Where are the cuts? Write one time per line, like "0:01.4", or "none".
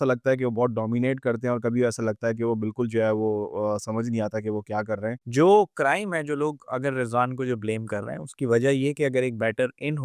0:05.2